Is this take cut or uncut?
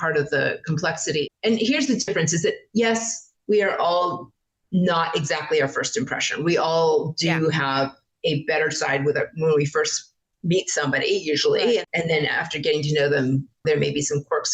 cut